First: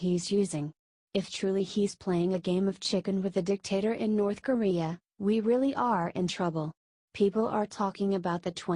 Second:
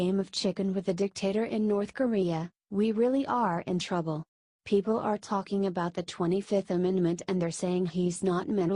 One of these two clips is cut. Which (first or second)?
first